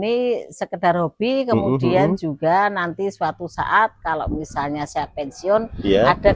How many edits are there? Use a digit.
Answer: 0